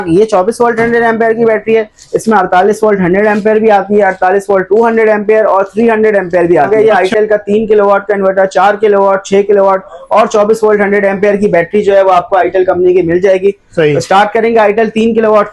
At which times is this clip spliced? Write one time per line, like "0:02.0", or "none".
0:06.7